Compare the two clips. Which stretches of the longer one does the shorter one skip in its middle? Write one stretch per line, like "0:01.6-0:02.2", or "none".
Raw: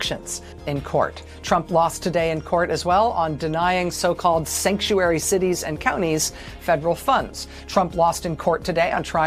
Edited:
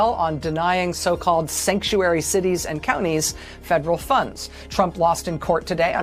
none